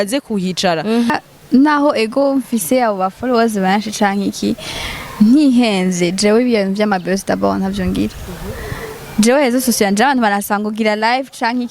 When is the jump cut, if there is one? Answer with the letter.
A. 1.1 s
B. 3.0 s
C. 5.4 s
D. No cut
A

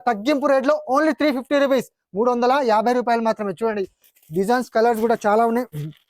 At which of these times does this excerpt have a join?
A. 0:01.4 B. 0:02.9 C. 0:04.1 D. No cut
D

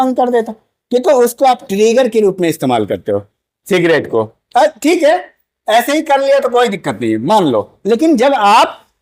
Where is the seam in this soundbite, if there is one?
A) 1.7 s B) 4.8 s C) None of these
C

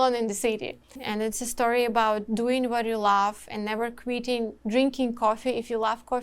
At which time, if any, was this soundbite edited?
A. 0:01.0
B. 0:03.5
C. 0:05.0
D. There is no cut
A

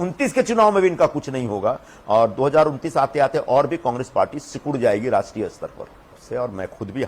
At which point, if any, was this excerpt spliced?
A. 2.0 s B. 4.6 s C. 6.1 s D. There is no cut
C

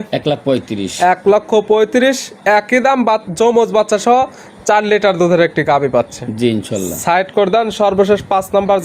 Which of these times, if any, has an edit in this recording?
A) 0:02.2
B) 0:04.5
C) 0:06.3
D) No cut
D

